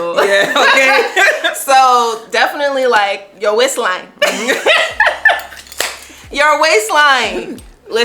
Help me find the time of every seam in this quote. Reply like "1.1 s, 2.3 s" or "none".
none